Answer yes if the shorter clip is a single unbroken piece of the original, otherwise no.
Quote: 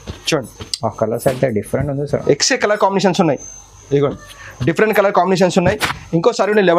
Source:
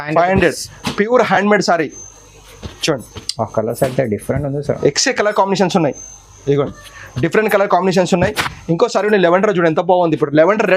yes